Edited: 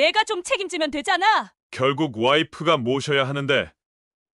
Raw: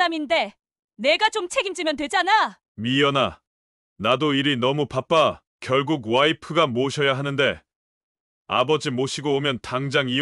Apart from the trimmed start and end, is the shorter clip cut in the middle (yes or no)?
yes